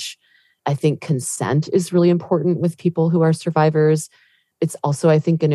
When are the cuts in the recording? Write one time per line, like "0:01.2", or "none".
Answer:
0:01.3